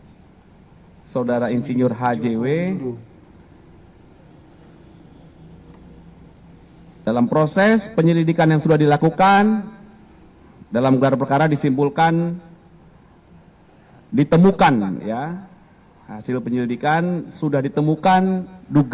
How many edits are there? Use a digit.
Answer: 0